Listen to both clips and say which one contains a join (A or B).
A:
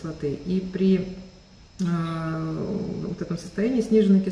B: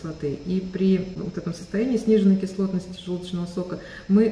B